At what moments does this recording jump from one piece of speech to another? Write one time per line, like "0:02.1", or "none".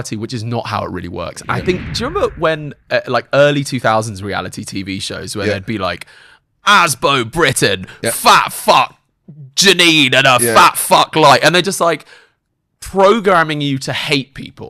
0:01.9